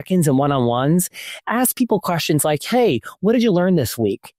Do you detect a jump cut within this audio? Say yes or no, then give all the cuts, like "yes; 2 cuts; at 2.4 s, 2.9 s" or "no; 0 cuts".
no; 0 cuts